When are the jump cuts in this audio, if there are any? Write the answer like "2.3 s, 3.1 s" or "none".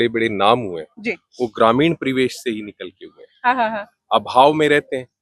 none